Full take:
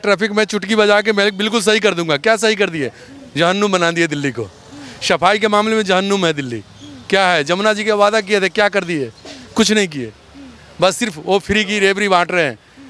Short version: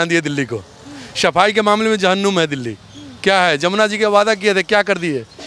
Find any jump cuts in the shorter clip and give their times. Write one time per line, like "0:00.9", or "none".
none